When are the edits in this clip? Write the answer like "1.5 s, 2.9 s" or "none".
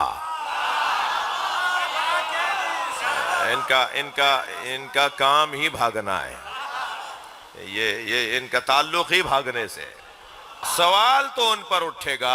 10.6 s